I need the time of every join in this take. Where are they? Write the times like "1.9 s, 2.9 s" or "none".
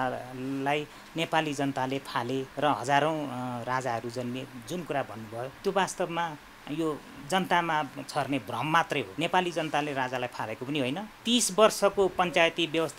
2.5 s, 5.5 s, 9.1 s, 11.1 s